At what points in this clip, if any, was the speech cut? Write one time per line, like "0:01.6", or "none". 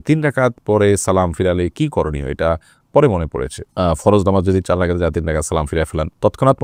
none